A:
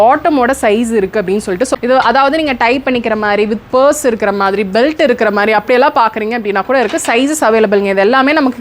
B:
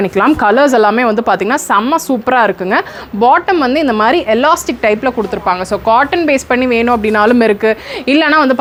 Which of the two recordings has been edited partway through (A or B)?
A